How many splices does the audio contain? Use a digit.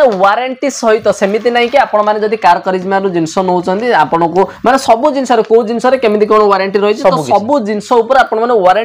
0